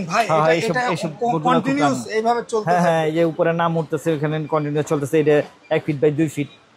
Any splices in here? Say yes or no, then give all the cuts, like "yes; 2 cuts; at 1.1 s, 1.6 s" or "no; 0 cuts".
no; 0 cuts